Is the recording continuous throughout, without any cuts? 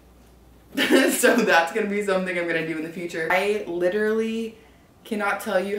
no; 1 cut; at 3.3 s

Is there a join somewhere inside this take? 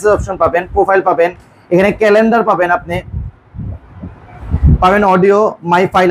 no; 0 cuts

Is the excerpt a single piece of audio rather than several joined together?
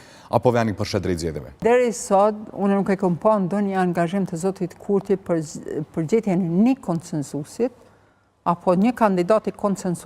no; 1 cut; at 1.5 s

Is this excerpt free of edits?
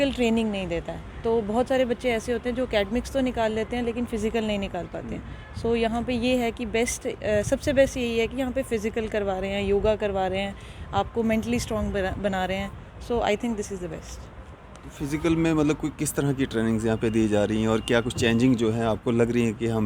yes; 0 cuts

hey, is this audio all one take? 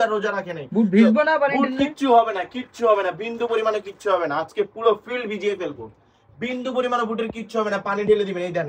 yes; 0 cuts

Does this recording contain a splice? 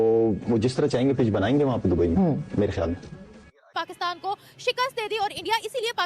yes; 1 cut; at 3.9 s

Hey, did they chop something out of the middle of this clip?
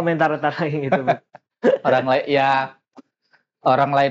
no; 0 cuts

